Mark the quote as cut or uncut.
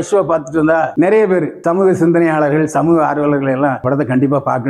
cut